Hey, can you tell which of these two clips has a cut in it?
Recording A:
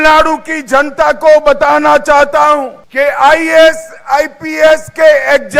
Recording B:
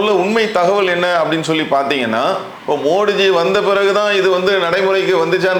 A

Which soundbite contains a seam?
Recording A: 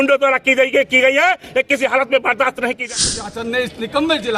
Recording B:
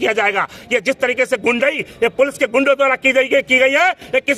A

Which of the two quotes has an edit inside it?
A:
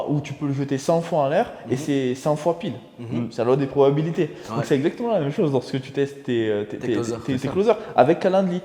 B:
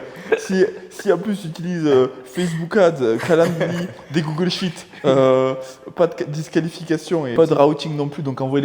B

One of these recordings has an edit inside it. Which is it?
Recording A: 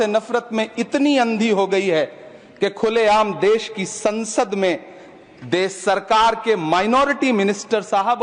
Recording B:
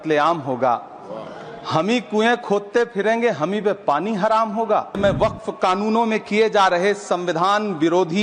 B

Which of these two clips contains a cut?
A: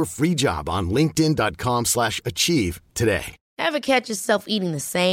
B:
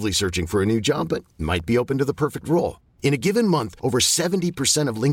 A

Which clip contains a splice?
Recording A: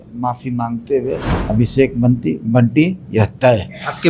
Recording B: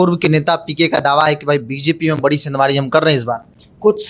A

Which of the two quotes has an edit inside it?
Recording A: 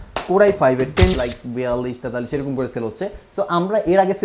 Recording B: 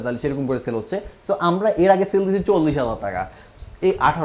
A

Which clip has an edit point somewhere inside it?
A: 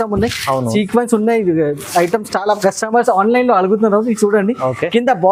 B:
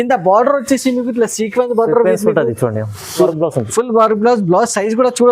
B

